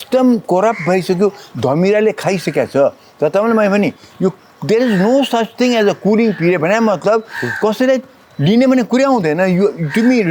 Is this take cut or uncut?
uncut